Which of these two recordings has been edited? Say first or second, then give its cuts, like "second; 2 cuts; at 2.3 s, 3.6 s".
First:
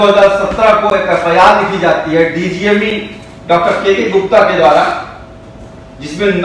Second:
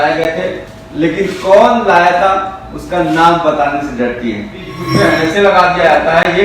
second; 1 cut; at 4.8 s